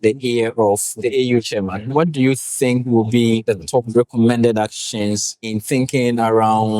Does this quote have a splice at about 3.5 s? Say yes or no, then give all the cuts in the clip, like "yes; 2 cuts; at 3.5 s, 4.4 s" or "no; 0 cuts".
yes; 4 cuts; at 1.0 s, 1.8 s, 3.5 s, 5.6 s